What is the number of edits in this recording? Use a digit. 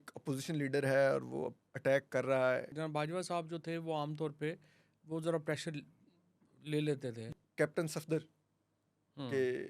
2